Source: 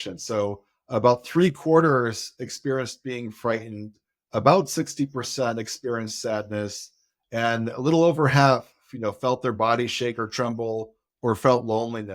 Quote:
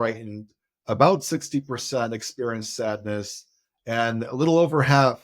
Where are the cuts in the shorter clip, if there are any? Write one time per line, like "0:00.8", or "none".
none